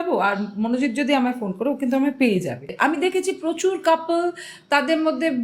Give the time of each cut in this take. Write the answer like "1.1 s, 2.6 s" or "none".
2.7 s